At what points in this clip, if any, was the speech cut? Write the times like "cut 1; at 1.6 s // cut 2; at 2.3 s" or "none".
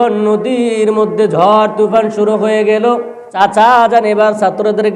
cut 1; at 3.4 s